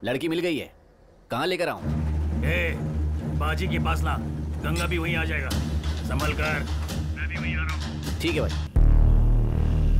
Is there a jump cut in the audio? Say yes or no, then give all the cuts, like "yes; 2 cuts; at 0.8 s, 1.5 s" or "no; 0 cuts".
yes; 1 cut; at 8.6 s